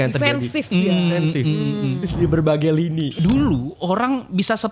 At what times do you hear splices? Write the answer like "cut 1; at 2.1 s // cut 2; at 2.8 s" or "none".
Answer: cut 1; at 3.1 s